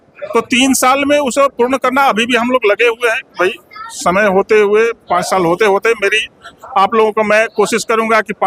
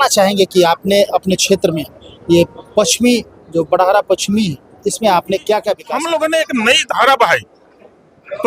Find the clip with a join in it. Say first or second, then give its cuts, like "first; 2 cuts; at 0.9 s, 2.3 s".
second; 1 cut; at 5.9 s